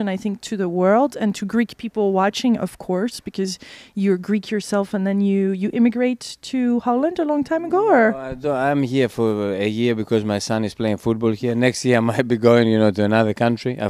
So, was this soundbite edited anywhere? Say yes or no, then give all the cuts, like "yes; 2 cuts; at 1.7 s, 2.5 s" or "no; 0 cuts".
no; 0 cuts